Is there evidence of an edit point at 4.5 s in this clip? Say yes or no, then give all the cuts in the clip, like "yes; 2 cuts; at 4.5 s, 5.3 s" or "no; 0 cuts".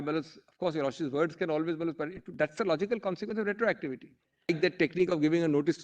yes; 1 cut; at 4.5 s